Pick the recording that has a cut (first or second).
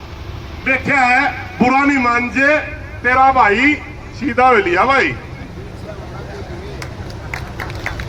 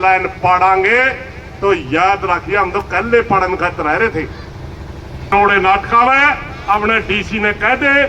second